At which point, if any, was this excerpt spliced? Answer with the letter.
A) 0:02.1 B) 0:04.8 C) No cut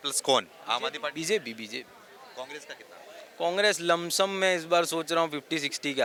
C